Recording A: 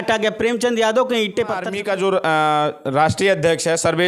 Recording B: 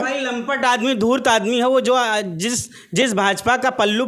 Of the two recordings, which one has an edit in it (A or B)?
A